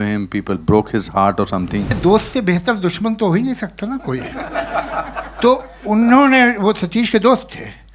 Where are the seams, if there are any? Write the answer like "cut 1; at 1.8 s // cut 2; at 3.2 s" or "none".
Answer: cut 1; at 2.0 s